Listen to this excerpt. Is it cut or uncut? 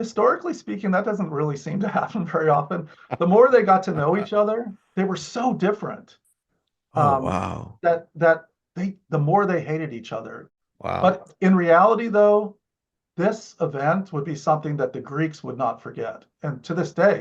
cut